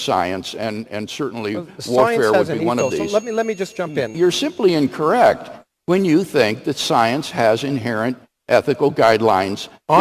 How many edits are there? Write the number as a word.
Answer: one